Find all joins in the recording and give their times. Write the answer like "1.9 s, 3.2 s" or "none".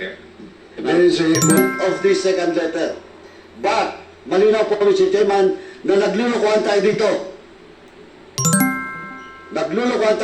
1.6 s